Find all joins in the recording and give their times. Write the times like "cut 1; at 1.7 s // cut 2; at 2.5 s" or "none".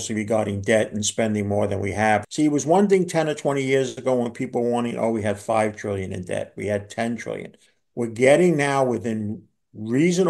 cut 1; at 2.3 s